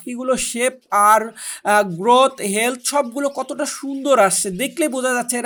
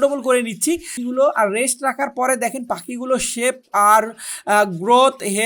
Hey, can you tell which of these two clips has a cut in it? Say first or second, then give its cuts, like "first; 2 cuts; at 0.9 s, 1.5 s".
second; 1 cut; at 0.9 s